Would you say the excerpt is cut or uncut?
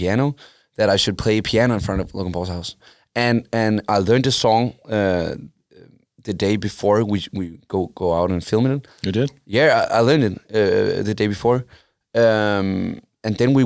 uncut